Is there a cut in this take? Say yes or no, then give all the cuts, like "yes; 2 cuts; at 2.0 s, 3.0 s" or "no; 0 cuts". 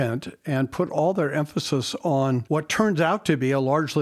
yes; 1 cut; at 2.4 s